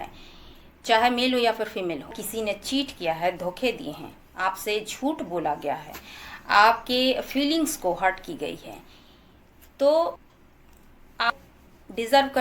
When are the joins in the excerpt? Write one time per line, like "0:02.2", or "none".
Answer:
0:02.3